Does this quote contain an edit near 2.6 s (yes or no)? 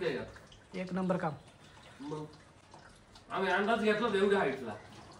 no